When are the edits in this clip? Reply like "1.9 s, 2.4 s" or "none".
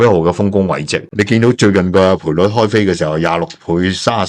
1.0 s